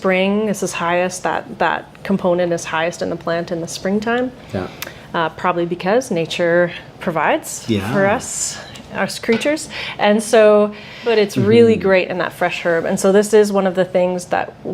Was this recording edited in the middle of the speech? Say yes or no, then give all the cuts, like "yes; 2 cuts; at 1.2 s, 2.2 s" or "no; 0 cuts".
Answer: yes; 1 cut; at 11.0 s